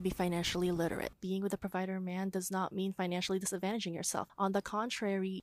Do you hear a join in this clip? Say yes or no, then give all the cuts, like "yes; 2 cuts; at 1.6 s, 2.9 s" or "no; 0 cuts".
yes; 1 cut; at 1.1 s